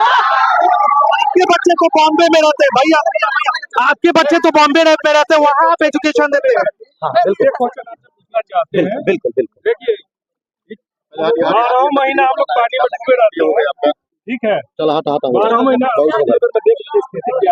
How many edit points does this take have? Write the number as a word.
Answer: zero